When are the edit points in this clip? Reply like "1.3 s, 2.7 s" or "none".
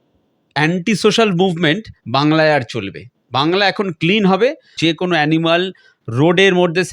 4.7 s